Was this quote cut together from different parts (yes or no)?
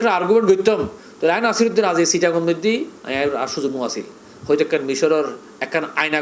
no